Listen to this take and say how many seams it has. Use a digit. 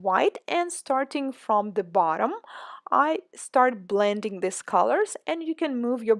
1